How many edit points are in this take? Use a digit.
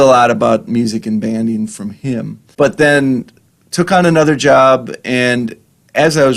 1